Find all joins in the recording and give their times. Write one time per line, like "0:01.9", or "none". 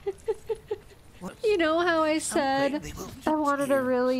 0:01.3